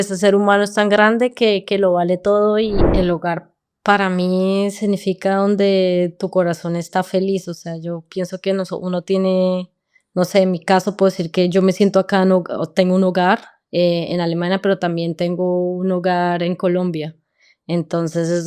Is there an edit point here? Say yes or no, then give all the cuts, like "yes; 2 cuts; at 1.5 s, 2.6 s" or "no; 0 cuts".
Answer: yes; 1 cut; at 2.9 s